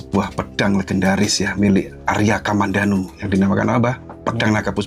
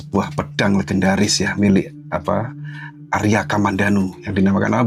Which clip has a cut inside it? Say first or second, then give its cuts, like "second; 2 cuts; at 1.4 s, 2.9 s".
first; 1 cut; at 2.0 s